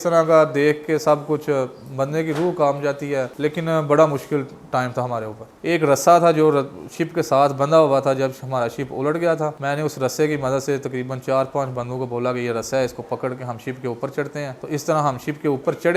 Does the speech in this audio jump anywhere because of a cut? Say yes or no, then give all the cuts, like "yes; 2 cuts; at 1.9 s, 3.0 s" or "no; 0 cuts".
yes; 4 cuts; at 3.3 s, 5.6 s, 9.6 s, 14.6 s